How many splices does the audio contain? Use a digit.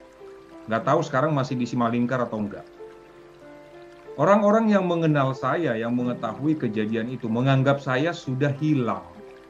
2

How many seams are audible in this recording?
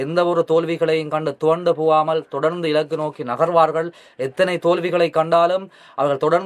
0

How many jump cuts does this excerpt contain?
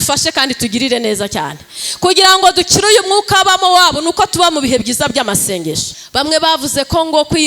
1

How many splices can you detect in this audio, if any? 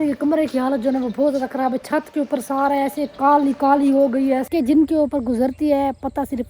1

